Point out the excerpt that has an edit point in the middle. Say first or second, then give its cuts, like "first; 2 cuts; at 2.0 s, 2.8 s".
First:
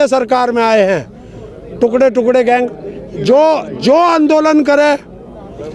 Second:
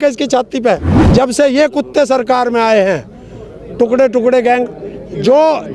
second; 1 cut; at 0.9 s